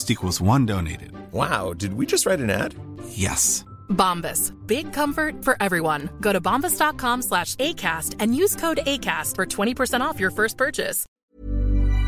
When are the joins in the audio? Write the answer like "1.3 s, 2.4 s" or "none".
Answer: 11.2 s